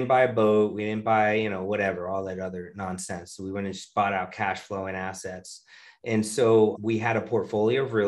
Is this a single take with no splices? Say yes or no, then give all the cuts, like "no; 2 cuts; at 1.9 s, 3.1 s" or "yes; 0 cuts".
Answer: no; 1 cut; at 6.8 s